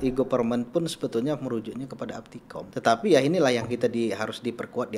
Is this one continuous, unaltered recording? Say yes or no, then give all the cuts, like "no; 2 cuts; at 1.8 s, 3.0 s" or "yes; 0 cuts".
no; 1 cut; at 2.7 s